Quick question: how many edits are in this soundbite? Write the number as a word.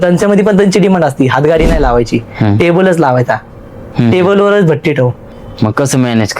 one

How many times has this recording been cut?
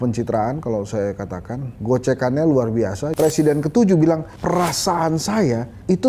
one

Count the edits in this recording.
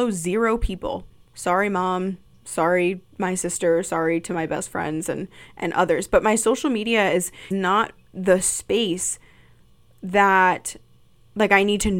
one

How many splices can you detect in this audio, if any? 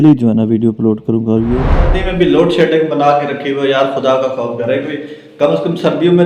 one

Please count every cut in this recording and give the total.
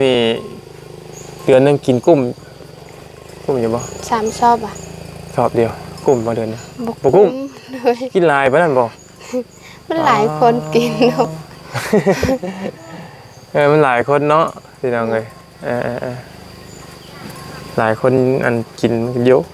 zero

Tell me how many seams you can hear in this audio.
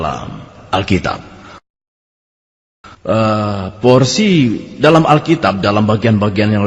one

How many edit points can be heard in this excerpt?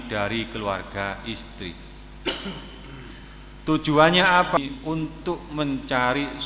one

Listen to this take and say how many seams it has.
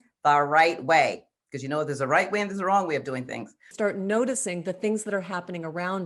one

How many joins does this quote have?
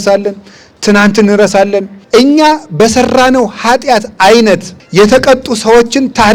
two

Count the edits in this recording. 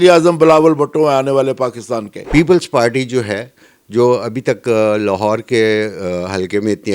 one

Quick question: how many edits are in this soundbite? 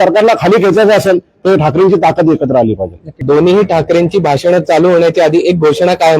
one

